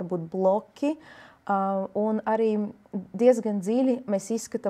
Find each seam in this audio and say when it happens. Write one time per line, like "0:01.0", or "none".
none

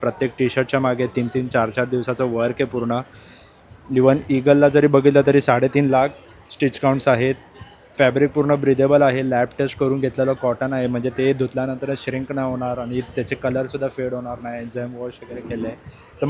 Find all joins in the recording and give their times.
none

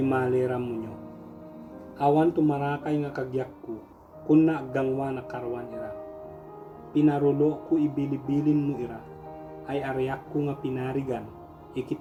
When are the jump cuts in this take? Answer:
none

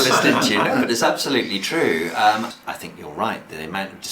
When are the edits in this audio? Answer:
0:02.5

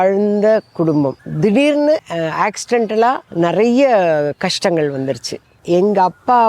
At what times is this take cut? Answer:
0:01.2
0:02.1
0:03.3
0:05.6

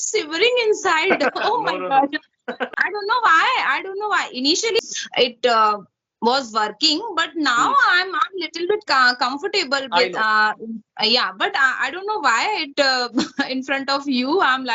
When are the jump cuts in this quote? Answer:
0:02.7
0:04.8

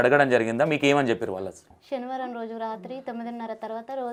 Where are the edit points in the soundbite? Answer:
none

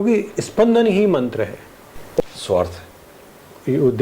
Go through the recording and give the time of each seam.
0:02.2

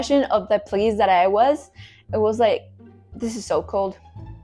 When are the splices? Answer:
none

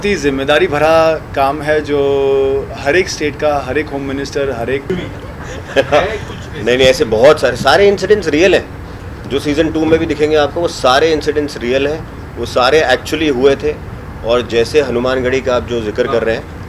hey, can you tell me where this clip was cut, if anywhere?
0:04.9

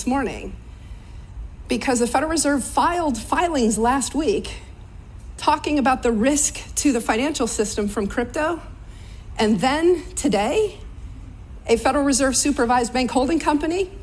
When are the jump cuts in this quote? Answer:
0:08.3
0:10.4

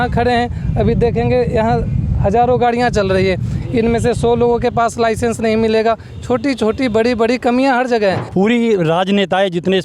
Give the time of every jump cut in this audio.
0:08.2

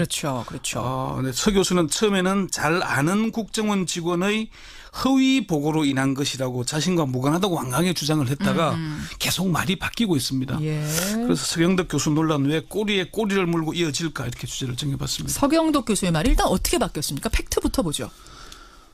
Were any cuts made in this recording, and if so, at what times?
0:17.9

